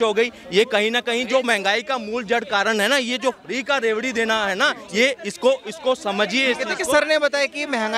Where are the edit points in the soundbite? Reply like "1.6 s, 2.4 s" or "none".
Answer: none